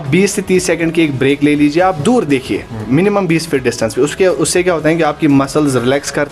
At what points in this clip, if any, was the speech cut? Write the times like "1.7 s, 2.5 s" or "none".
none